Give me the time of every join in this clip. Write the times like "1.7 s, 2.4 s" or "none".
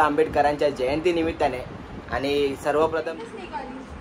3.1 s